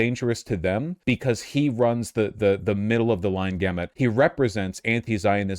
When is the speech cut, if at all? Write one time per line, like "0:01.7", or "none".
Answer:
0:00.9
0:03.9